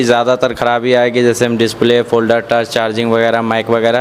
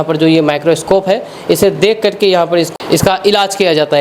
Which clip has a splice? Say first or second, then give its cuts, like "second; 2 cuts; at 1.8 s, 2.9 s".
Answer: second; 1 cut; at 2.8 s